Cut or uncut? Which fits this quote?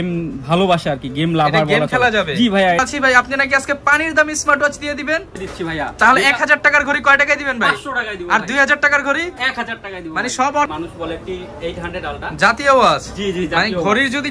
cut